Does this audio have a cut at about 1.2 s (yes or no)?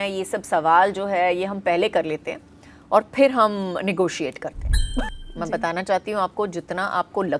no